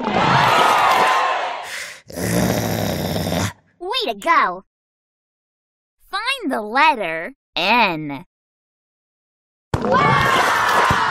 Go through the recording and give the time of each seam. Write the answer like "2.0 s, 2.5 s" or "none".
1.6 s

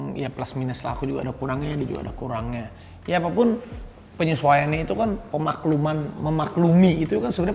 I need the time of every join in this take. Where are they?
none

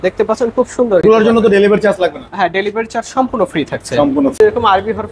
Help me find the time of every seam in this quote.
1.0 s, 4.4 s

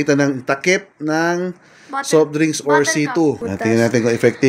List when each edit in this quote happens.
3.5 s

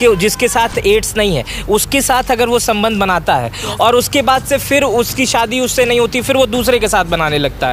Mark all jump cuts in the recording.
none

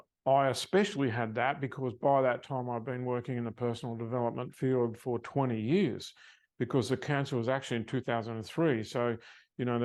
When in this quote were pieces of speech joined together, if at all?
none

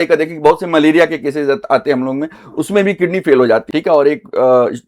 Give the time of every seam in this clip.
3.7 s

